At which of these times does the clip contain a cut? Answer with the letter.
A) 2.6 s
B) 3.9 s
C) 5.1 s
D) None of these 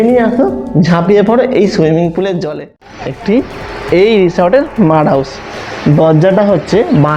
A